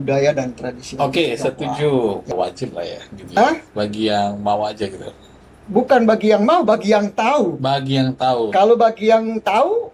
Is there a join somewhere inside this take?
yes; 1 cut; at 2.3 s

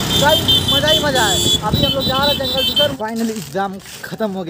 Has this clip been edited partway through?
yes; 1 cut; at 2.9 s

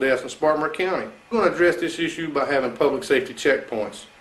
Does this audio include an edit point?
yes; 1 cut; at 1.2 s

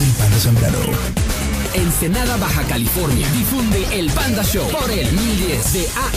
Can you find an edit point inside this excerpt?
yes; 1 cut; at 4.5 s

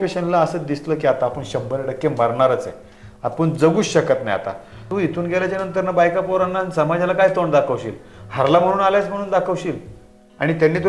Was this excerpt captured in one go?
no; 1 cut; at 4.8 s

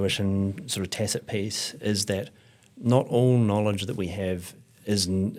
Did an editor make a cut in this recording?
no; 0 cuts

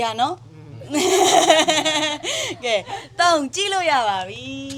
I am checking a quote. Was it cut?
no; 0 cuts

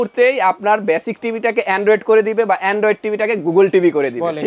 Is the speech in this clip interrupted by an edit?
no; 0 cuts

